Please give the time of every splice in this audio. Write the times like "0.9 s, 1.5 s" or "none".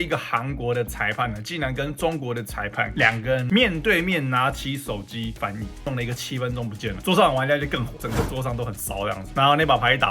5.8 s